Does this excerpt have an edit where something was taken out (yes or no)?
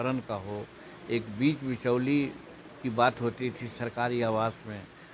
no